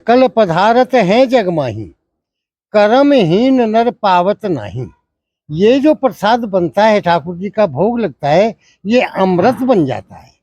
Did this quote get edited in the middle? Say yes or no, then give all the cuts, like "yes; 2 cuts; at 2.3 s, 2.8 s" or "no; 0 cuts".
no; 0 cuts